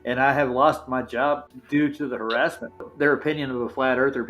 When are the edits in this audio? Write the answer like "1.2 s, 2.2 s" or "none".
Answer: 2.9 s